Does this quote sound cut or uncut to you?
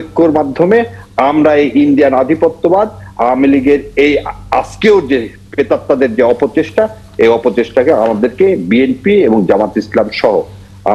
uncut